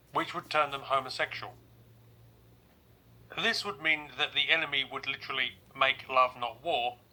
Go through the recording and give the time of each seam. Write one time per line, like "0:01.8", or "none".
none